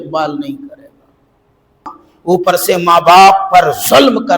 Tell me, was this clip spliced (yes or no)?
yes